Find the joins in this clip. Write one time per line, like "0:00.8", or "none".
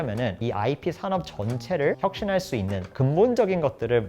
0:02.0